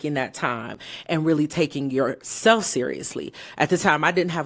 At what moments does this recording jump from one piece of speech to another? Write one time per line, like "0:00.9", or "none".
none